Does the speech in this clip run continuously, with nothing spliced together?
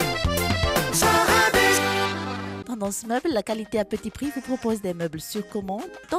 no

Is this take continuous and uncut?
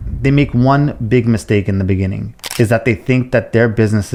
yes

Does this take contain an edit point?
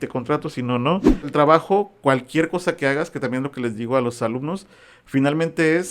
yes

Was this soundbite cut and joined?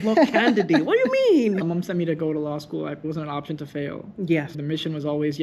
yes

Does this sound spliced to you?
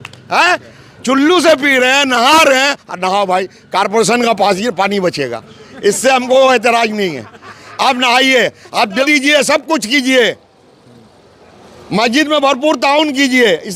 yes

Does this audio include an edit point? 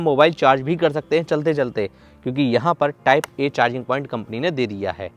no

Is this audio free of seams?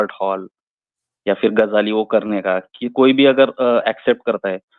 yes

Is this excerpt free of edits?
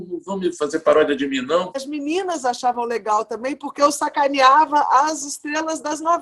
no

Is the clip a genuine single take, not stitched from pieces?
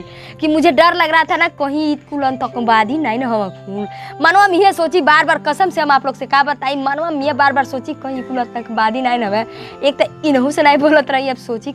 yes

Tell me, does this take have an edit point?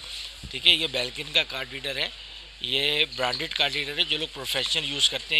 no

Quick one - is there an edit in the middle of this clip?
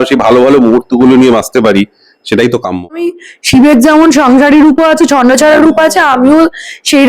yes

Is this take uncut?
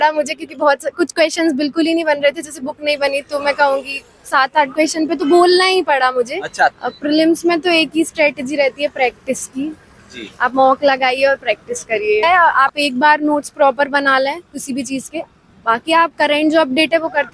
no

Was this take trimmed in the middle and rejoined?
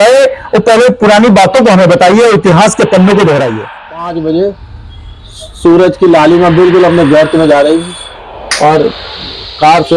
yes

